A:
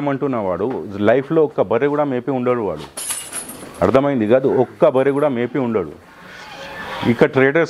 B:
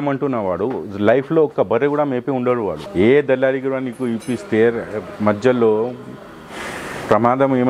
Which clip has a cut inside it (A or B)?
B